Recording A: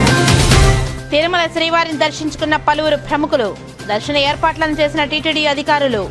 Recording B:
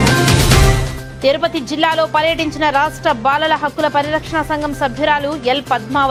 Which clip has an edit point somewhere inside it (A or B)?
A